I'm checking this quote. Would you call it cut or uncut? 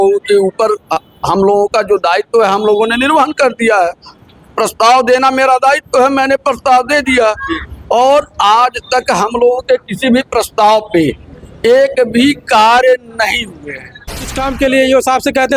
cut